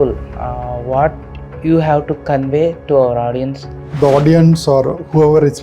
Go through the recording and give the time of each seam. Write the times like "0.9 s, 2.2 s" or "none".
3.8 s